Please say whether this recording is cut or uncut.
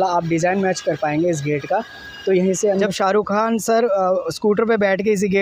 cut